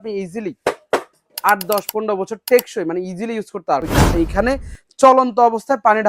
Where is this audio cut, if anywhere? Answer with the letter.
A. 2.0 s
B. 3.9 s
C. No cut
B